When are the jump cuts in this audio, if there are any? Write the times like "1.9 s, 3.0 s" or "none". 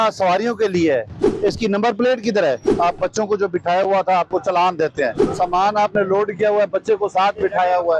1.3 s, 2.7 s, 5.2 s